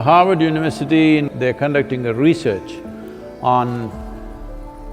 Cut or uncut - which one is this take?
cut